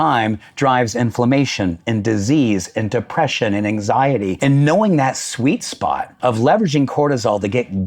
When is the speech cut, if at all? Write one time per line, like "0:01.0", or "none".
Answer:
0:04.4
0:06.1

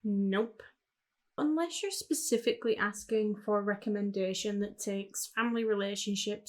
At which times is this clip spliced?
0:01.4

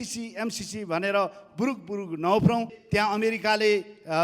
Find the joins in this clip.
0:02.8

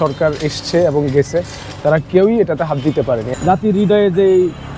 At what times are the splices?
0:03.3

